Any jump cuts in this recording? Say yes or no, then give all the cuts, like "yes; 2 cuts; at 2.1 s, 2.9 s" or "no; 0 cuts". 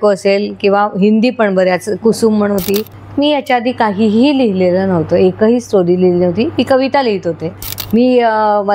yes; 2 cuts; at 3.0 s, 7.5 s